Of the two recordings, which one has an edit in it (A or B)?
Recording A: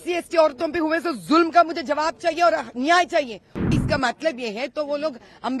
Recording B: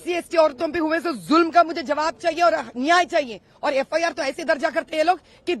A